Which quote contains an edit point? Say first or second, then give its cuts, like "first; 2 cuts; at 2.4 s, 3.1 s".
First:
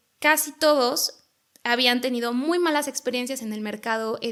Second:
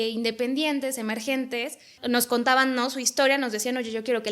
second; 1 cut; at 1.9 s